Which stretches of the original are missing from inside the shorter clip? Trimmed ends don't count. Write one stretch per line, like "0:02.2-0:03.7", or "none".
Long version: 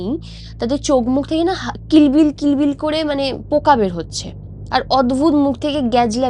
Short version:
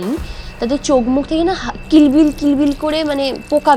none